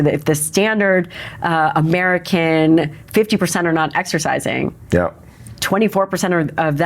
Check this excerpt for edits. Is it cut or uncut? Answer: uncut